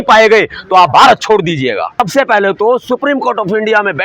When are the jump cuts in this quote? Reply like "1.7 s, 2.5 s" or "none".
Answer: 2.0 s